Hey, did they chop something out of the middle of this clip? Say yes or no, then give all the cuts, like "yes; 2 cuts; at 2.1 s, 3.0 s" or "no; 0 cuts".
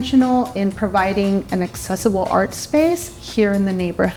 no; 0 cuts